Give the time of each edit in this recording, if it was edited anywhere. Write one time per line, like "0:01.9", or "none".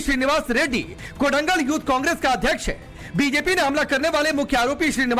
0:03.2